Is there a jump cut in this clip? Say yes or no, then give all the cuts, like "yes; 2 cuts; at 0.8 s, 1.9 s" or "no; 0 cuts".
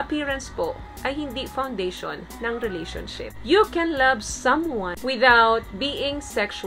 yes; 2 cuts; at 3.3 s, 5.0 s